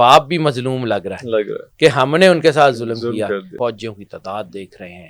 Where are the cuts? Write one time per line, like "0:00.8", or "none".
0:03.5